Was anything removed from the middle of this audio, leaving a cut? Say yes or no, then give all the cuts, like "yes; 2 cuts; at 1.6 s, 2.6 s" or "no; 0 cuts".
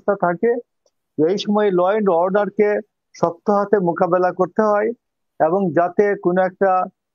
no; 0 cuts